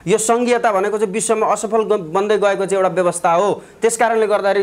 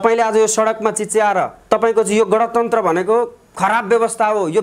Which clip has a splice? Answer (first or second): second